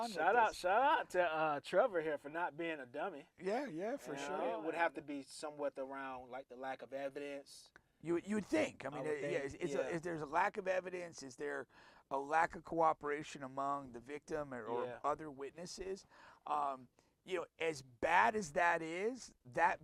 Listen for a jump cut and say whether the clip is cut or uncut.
cut